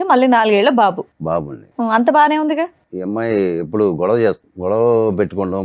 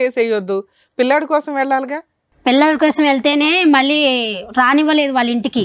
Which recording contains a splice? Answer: first; 2 cuts; at 2.9 s, 4.5 s

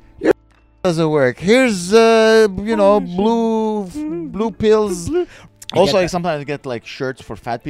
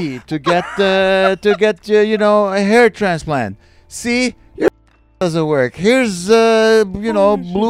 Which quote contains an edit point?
first; 1 cut; at 5.4 s

